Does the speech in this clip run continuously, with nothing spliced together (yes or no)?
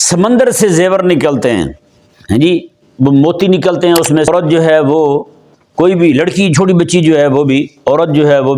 no